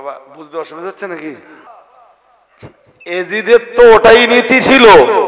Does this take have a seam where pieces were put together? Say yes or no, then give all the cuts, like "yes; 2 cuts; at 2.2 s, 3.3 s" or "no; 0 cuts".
yes; 1 cut; at 1.7 s